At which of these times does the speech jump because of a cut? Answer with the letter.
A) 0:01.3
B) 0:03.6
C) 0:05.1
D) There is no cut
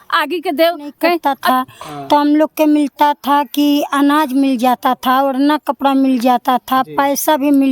A